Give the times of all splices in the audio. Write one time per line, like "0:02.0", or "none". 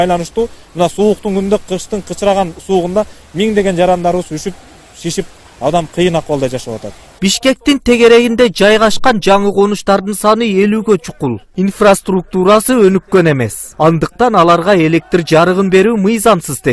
0:12.0